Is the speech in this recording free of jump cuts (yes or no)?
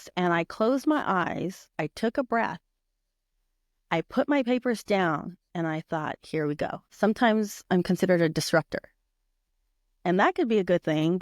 no